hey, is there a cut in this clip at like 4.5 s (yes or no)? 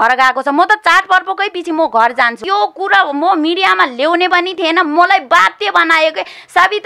no